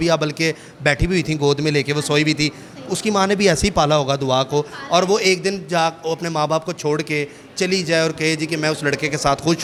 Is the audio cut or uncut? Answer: uncut